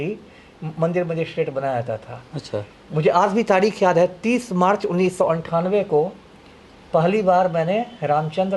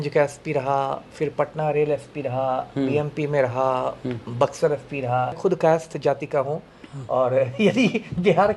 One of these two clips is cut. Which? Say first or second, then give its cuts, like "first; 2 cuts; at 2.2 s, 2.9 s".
second; 1 cut; at 5.4 s